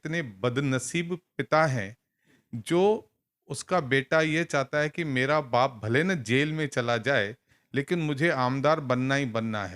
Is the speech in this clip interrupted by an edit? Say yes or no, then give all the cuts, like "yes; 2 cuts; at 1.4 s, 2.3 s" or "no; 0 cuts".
no; 0 cuts